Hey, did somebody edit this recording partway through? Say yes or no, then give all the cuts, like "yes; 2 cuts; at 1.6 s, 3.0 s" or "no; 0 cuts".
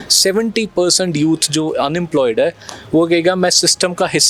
no; 0 cuts